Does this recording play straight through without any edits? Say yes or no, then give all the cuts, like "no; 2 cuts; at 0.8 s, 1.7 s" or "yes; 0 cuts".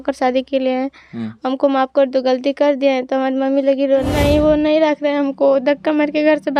no; 1 cut; at 4.1 s